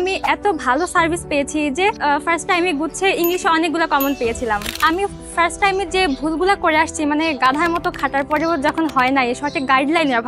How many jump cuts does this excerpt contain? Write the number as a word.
two